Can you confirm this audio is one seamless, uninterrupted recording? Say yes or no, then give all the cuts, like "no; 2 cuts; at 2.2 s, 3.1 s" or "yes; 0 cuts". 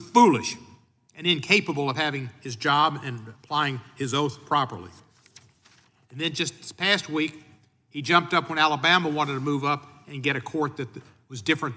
yes; 0 cuts